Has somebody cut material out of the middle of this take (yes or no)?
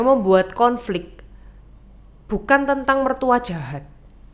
no